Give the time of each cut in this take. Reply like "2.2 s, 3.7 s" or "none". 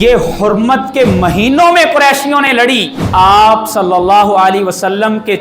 3.0 s